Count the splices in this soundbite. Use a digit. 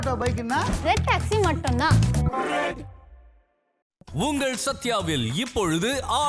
0